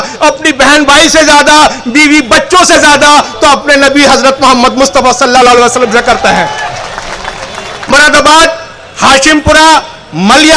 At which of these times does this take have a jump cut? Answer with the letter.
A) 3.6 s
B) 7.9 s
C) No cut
B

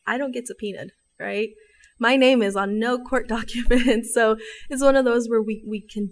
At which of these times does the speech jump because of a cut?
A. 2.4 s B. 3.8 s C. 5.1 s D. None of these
D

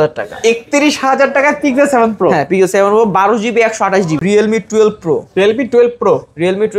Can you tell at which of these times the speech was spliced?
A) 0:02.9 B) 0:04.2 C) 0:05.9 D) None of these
B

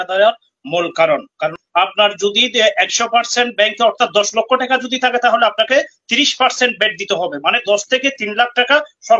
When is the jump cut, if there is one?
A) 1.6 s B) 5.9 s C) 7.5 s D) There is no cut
A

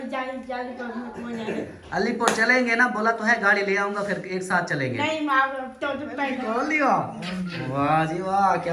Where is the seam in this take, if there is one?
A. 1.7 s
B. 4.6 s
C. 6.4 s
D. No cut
C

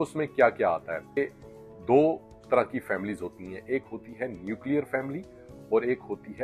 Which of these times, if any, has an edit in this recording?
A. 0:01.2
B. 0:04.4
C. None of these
A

